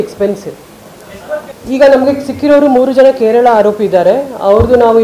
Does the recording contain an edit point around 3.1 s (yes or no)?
no